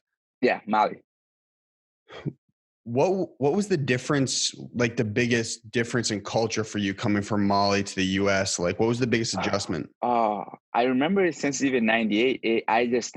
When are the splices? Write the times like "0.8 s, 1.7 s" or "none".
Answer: none